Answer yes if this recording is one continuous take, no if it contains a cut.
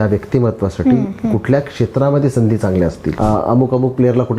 no